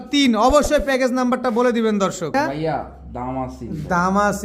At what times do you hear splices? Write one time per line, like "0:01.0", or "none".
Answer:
0:02.4